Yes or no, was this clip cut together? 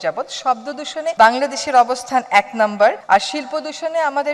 yes